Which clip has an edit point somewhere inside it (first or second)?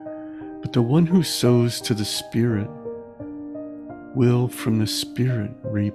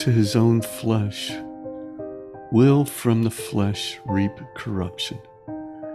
first